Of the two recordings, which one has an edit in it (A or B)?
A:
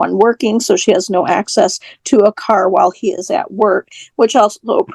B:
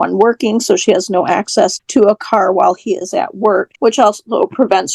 B